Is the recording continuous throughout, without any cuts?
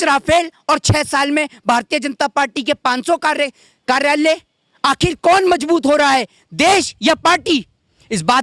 yes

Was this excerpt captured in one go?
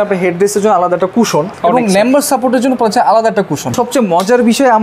no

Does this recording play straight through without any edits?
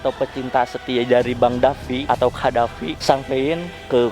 no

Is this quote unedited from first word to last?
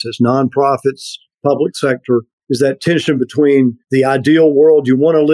no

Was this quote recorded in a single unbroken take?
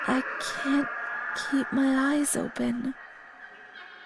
no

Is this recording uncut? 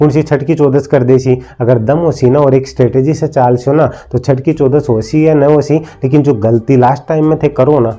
yes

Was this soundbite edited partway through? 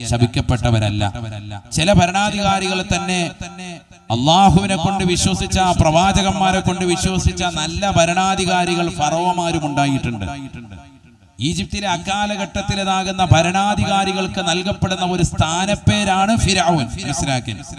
no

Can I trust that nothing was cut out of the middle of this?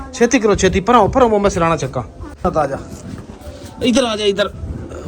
no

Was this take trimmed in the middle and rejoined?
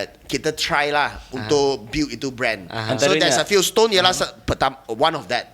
no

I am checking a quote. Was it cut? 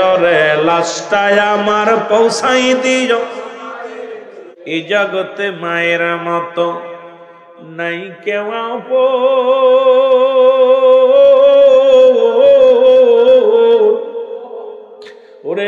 yes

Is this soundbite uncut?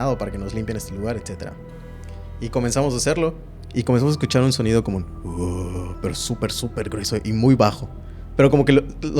no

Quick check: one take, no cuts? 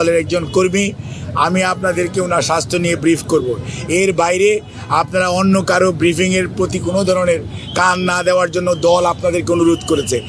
yes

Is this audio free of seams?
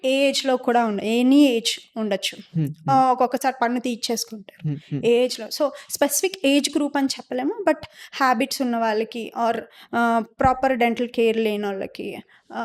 yes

